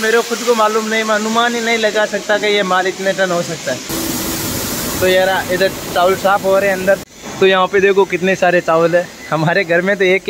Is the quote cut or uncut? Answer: cut